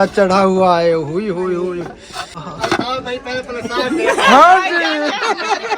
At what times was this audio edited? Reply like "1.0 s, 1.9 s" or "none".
2.4 s